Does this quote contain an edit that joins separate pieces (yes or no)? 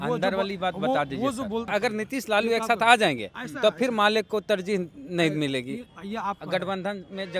yes